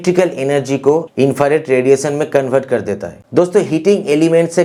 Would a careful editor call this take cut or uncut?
uncut